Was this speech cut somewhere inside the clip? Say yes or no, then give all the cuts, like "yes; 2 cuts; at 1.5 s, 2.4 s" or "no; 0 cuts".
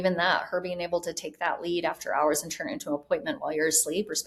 no; 0 cuts